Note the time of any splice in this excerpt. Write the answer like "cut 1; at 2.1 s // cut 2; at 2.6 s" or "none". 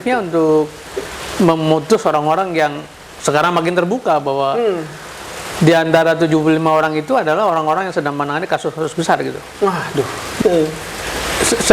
cut 1; at 10.4 s